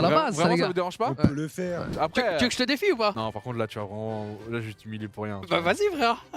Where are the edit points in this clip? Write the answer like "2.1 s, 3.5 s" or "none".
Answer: 1.9 s